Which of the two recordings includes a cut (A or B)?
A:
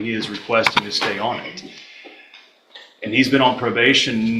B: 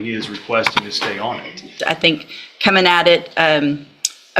B